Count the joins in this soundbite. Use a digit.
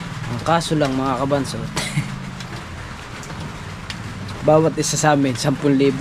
0